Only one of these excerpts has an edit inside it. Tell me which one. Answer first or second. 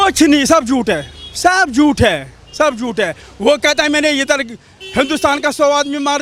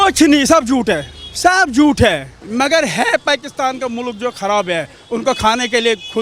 second